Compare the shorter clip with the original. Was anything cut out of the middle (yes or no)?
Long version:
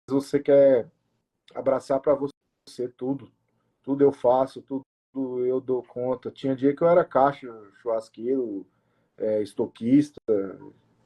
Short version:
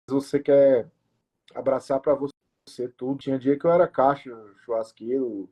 yes